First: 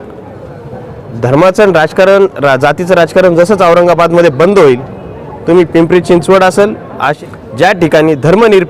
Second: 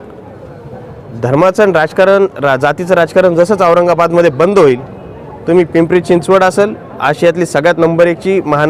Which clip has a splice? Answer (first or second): first